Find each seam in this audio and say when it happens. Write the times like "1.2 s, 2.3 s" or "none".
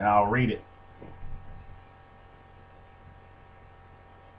2.2 s